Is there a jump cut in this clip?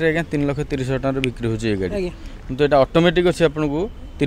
no; 0 cuts

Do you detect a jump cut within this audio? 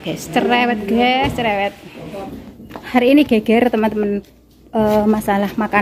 yes; 1 cut; at 2.7 s

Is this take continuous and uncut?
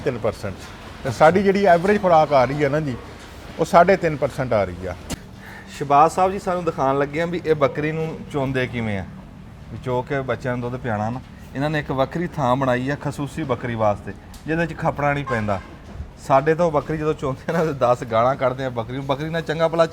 no; 1 cut; at 5.1 s

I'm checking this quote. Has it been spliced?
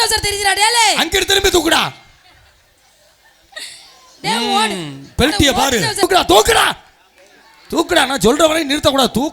yes; 1 cut; at 6.0 s

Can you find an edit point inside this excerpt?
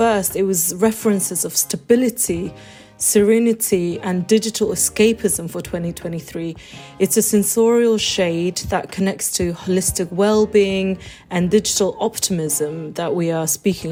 no; 0 cuts

